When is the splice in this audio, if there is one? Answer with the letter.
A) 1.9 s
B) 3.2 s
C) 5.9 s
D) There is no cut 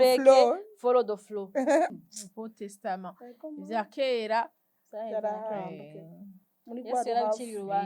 A